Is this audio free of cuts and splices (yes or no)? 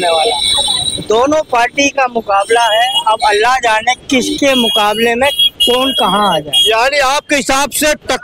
yes